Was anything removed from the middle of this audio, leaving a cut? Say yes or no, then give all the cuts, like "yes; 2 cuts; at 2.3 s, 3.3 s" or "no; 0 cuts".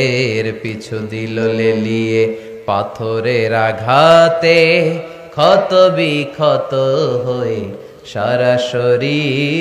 no; 0 cuts